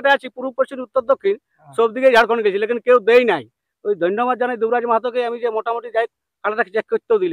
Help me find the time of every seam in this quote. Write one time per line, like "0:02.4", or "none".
none